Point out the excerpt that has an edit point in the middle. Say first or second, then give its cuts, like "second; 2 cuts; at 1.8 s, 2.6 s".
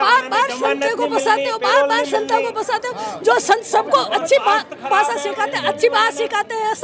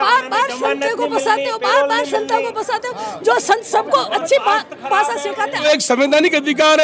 second; 1 cut; at 5.6 s